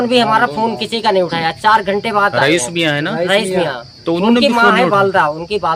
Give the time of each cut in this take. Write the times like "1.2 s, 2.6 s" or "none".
none